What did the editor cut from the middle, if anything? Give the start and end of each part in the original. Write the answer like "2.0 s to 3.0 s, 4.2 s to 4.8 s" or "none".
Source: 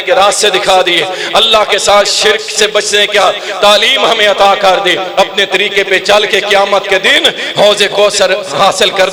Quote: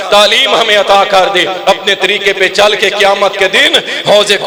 none